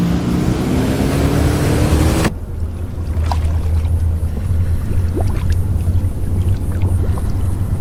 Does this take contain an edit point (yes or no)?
no